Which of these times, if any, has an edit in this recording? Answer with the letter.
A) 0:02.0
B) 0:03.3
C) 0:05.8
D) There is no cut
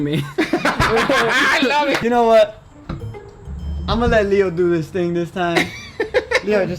A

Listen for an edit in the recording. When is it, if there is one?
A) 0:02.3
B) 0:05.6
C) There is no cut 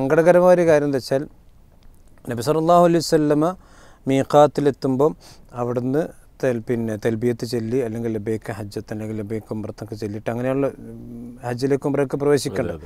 C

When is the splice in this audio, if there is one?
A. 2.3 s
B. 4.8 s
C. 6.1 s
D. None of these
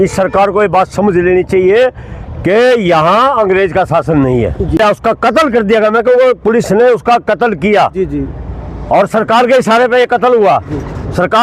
B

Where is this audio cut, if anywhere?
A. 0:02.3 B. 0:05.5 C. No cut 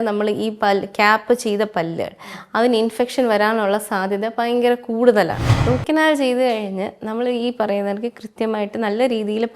B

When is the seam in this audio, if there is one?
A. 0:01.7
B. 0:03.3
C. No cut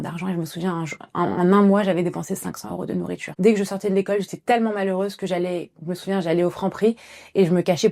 B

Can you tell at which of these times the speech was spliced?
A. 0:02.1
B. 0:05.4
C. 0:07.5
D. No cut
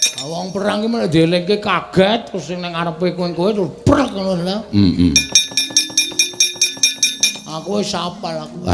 D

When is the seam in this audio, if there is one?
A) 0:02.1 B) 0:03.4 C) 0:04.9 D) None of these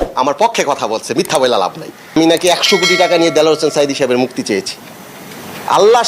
A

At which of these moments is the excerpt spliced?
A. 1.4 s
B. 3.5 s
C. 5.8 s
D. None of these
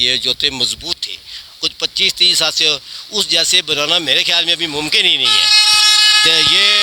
D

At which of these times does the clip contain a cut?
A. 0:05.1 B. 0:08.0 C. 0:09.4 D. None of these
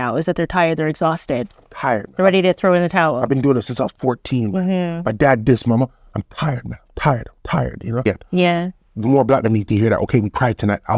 B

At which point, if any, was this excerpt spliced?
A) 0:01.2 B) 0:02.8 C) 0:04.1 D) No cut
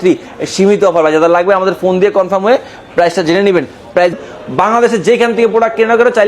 C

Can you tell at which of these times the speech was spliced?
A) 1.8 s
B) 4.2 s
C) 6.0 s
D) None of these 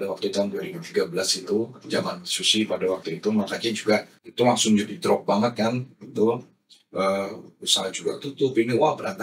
B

